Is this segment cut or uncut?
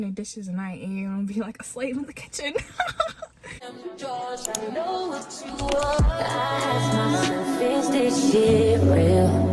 cut